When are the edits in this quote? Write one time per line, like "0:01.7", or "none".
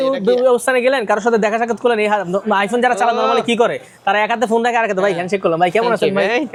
none